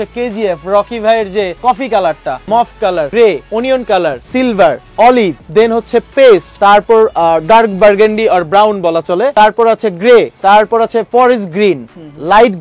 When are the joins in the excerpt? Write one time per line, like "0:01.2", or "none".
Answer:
0:02.7
0:09.3